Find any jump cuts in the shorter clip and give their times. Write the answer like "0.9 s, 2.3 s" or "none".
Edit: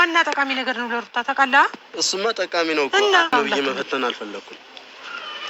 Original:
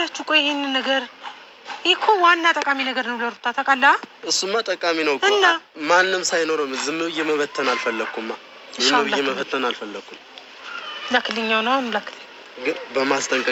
3.3 s